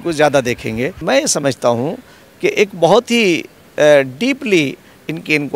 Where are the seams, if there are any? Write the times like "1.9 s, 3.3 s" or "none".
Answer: 1.0 s